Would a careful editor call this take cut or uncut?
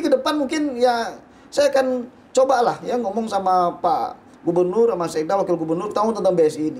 uncut